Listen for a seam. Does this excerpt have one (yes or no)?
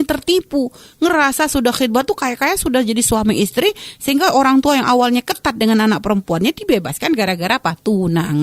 no